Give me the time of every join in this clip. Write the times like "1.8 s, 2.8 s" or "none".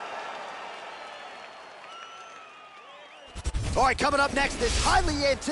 3.4 s